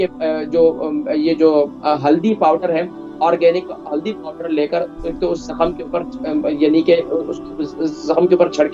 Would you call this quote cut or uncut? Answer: uncut